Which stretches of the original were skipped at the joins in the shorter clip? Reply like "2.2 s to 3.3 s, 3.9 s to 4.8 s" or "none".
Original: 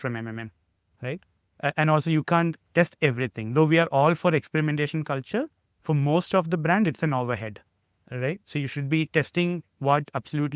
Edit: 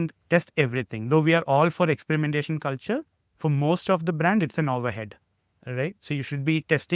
none

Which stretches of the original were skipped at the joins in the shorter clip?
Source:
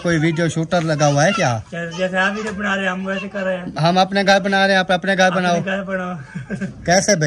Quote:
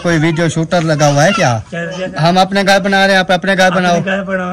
2.0 s to 3.6 s

